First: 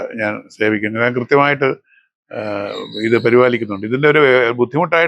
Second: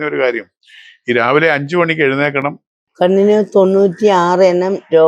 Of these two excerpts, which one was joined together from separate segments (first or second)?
second